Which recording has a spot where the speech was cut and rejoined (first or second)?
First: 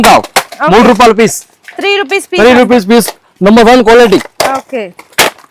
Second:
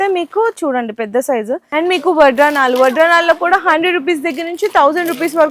second